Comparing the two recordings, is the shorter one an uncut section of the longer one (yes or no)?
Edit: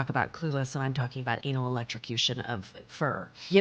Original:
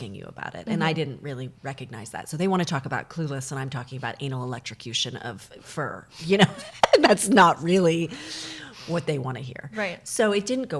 yes